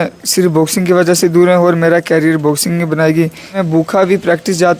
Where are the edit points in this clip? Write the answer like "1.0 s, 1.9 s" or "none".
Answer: 3.6 s